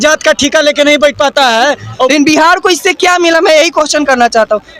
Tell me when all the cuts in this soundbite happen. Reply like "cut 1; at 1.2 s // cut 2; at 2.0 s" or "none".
cut 1; at 2.1 s